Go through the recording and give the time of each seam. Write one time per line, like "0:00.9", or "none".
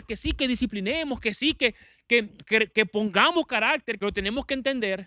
0:03.9